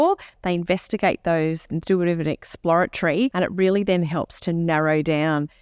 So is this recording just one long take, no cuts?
no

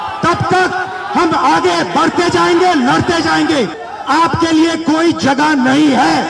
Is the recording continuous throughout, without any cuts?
no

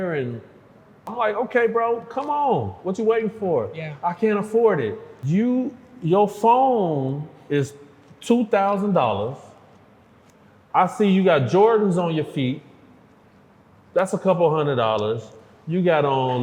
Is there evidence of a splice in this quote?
yes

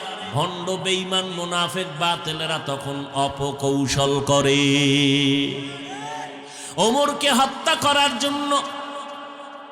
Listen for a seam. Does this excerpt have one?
yes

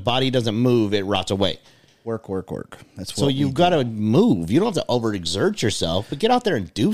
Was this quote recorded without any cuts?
yes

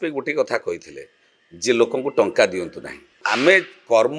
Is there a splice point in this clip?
yes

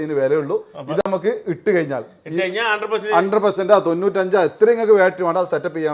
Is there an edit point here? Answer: no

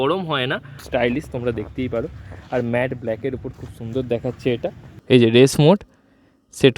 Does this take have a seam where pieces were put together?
yes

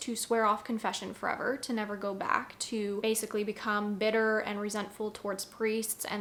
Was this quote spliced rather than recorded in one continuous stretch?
no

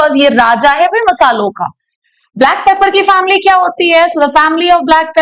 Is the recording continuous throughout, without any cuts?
yes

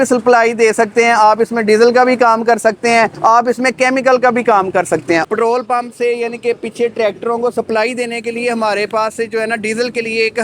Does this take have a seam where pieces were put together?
yes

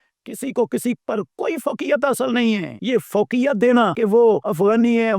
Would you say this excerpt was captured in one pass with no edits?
no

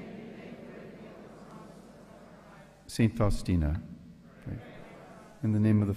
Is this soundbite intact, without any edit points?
yes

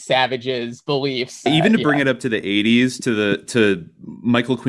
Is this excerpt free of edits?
no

